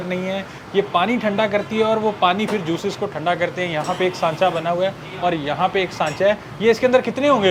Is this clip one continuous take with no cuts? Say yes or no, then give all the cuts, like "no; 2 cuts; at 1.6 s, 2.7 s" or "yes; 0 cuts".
yes; 0 cuts